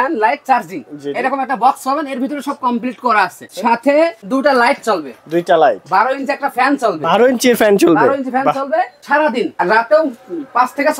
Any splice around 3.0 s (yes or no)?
no